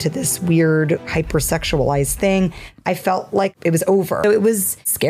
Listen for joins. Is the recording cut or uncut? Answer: cut